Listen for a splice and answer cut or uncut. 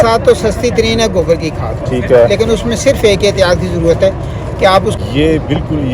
cut